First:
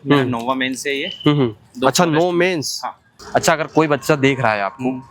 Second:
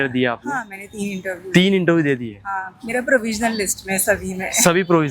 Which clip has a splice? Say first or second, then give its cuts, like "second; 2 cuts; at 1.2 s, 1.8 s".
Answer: first; 1 cut; at 3.1 s